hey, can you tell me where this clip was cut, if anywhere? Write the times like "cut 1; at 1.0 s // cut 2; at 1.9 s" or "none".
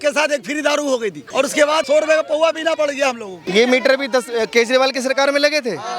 cut 1; at 1.2 s // cut 2; at 3.4 s